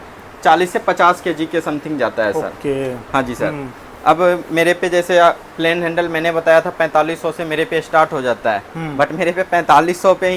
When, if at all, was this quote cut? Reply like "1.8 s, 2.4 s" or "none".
none

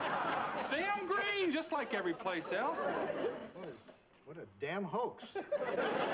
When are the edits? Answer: 4.3 s

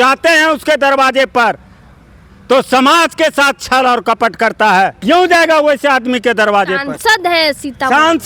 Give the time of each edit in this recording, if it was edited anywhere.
5.0 s

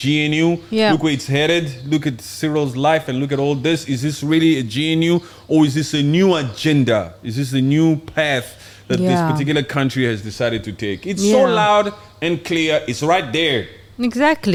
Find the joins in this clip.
none

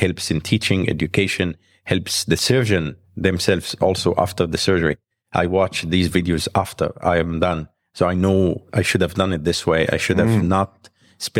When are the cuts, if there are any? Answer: none

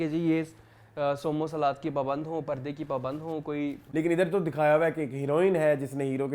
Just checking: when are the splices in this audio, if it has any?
3.8 s

